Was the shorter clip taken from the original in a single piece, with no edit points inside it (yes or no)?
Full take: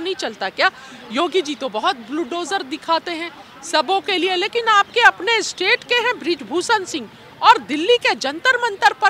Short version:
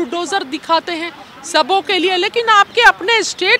yes